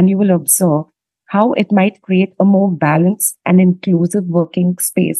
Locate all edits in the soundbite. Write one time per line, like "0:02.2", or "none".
none